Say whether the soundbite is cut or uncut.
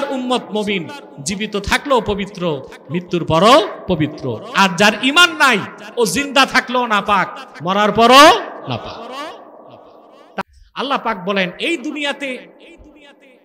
cut